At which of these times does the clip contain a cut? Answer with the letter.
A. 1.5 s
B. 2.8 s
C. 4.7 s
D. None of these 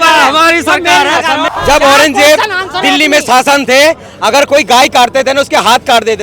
A